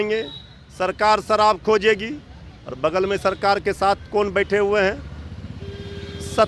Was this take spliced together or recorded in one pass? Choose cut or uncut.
uncut